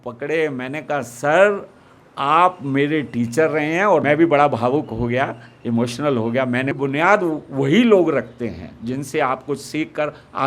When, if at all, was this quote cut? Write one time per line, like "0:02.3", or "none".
0:04.0
0:06.7